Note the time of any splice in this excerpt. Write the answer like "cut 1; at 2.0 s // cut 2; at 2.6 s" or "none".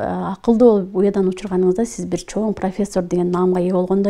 none

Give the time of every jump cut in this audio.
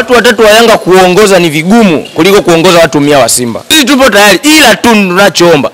cut 1; at 3.7 s

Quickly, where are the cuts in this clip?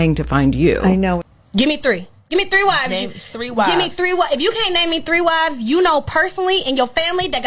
cut 1; at 1.2 s

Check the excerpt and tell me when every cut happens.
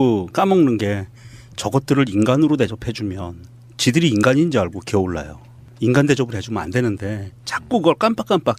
cut 1; at 5.9 s

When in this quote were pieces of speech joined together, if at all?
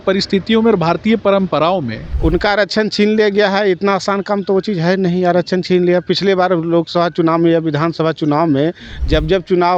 cut 1; at 2.0 s

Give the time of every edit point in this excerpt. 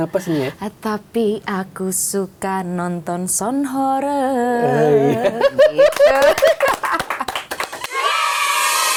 none

